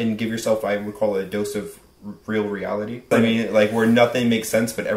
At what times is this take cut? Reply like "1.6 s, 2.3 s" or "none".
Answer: 3.1 s